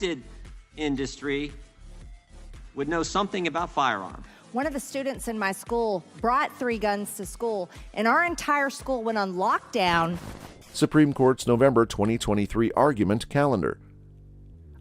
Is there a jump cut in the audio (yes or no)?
no